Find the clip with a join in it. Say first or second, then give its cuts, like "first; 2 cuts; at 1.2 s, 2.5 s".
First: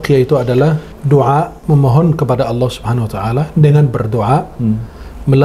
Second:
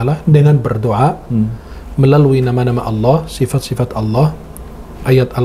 first; 2 cuts; at 0.9 s, 1.6 s